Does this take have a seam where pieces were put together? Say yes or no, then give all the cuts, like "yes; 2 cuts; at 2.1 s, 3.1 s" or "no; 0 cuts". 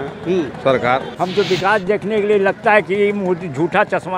yes; 1 cut; at 1.1 s